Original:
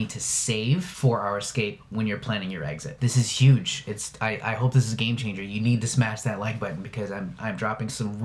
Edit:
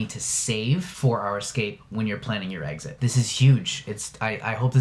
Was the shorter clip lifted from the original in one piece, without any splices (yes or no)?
yes